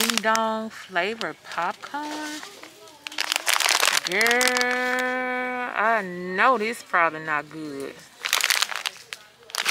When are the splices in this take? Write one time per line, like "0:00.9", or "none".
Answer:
none